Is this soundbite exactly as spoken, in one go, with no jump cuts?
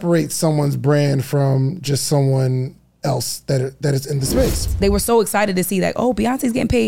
no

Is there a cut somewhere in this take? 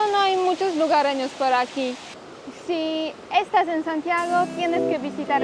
yes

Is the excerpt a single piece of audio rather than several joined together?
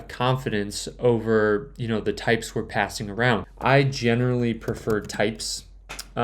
no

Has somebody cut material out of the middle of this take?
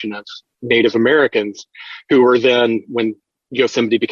no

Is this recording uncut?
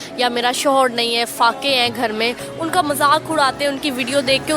no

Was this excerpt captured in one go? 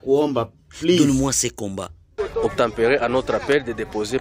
no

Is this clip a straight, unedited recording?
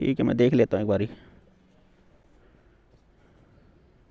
yes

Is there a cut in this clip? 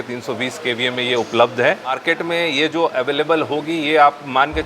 yes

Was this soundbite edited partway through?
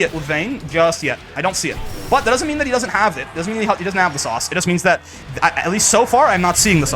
no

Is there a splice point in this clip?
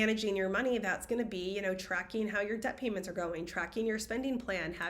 no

